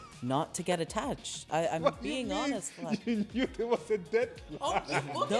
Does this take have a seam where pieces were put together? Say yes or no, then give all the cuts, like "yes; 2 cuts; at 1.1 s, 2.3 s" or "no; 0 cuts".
no; 0 cuts